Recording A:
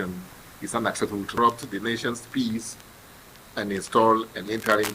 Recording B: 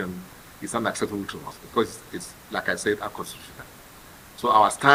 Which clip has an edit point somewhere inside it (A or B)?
A